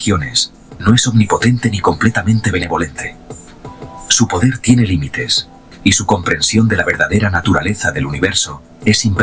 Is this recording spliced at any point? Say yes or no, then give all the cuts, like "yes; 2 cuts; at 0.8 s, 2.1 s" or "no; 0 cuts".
no; 0 cuts